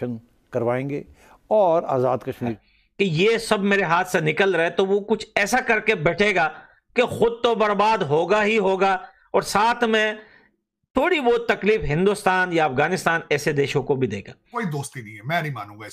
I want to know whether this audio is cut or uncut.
cut